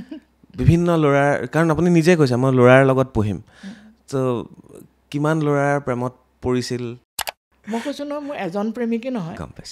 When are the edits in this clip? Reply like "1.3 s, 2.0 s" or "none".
7.1 s